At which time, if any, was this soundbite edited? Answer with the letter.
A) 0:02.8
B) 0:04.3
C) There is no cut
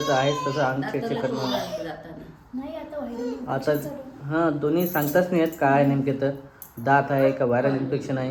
C